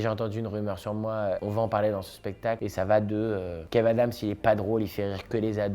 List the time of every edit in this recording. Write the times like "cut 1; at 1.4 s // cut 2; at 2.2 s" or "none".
cut 1; at 1.4 s // cut 2; at 2.6 s